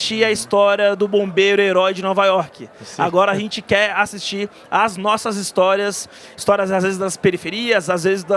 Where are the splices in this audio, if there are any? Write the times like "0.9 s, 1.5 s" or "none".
none